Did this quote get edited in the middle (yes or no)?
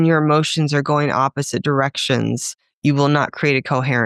no